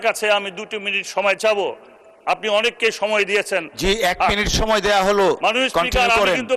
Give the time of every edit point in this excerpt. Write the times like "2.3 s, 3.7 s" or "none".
none